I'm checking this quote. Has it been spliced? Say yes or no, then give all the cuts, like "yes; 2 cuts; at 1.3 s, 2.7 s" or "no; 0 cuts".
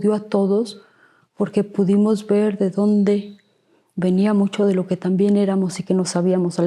no; 0 cuts